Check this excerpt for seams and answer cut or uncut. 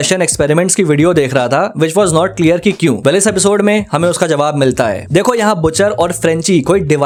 uncut